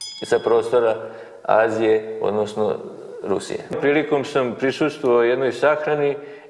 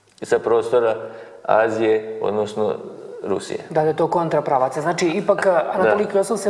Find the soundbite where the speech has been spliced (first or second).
first